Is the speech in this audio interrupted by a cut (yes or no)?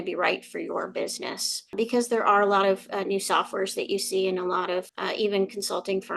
yes